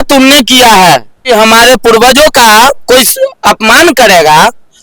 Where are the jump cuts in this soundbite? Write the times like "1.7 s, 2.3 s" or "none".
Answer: 1.2 s